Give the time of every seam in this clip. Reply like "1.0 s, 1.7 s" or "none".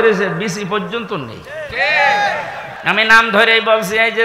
2.8 s